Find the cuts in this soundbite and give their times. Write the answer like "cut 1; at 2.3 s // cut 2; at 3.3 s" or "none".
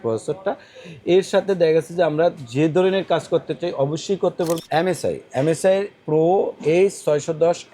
cut 1; at 4.6 s